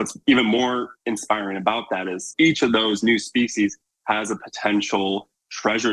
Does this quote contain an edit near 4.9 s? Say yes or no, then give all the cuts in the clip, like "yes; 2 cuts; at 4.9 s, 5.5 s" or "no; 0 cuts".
no; 2 cuts; at 0.9 s, 2.3 s